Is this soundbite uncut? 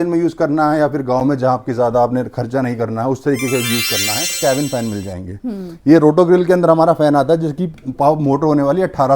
no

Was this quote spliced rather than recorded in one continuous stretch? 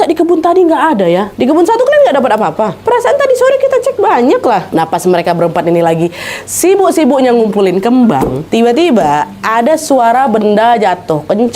yes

